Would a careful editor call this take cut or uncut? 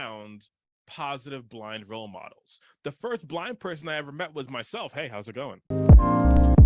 cut